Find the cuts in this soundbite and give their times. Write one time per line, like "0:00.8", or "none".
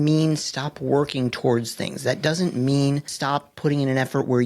0:03.1